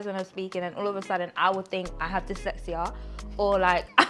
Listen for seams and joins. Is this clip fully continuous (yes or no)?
yes